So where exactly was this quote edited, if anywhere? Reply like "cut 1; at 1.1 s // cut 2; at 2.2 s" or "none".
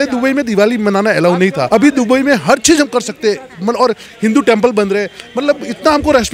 cut 1; at 1.6 s